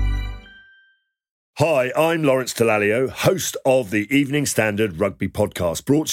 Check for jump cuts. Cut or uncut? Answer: cut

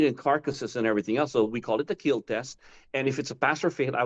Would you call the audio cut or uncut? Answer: uncut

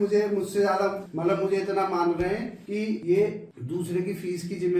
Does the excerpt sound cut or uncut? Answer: cut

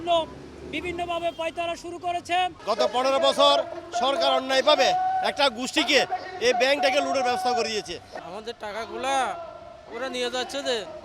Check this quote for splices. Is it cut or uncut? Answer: cut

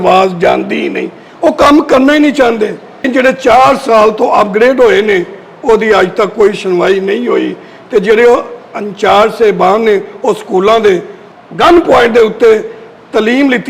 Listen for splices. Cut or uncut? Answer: cut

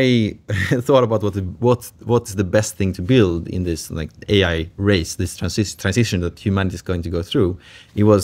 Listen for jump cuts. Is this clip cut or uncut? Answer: uncut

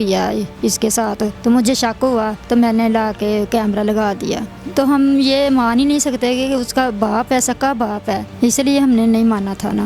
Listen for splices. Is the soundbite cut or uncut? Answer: cut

